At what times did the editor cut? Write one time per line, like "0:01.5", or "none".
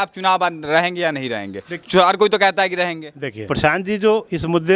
0:03.5

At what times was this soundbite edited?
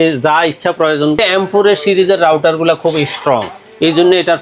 0:01.2

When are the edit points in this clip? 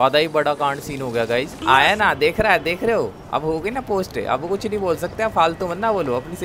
0:01.5

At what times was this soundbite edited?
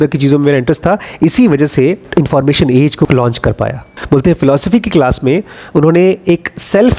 0:03.1
0:03.9

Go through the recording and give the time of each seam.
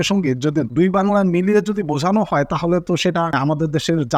none

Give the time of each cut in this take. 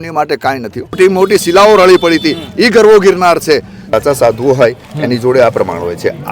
0:01.0
0:03.9

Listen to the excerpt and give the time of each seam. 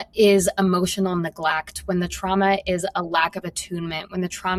none

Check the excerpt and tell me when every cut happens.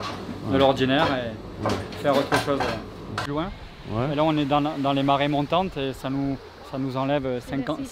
0:03.2

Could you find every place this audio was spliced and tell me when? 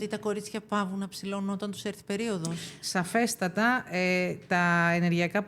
0:02.7

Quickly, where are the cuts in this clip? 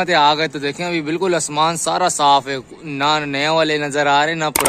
none

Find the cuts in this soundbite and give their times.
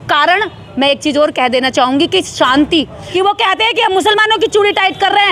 0:03.0

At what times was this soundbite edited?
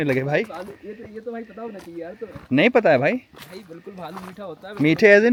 none

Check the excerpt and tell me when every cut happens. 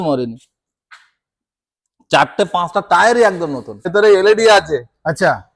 0:03.9

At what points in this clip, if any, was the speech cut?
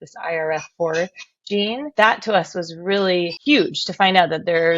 0:01.9

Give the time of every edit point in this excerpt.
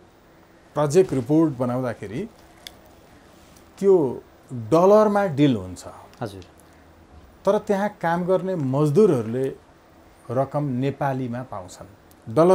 none

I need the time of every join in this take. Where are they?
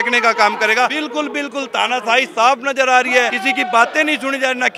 0:00.9
0:03.4

